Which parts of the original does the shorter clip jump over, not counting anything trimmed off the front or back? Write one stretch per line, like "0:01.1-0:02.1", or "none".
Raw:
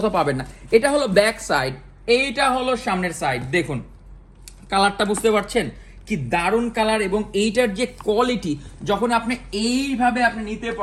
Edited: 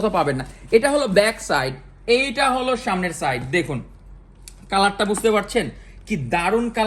none